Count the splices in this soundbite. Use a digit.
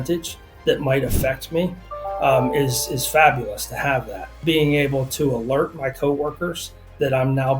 1